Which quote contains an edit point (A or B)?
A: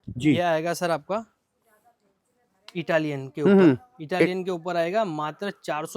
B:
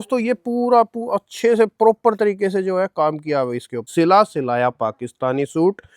B